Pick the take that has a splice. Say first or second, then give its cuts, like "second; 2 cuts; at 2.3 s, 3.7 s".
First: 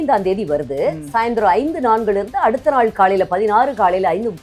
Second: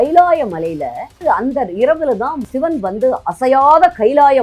second; 2 cuts; at 1.2 s, 2.4 s